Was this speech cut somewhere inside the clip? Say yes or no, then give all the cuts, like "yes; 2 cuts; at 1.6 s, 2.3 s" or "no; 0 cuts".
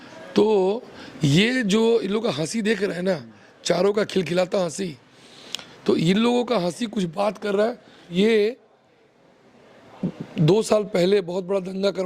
yes; 1 cut; at 8.1 s